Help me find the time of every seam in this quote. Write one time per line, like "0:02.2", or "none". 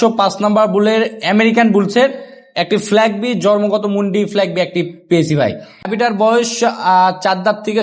0:05.8